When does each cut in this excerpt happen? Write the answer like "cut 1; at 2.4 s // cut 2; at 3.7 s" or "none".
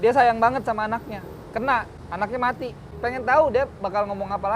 cut 1; at 2.0 s // cut 2; at 2.8 s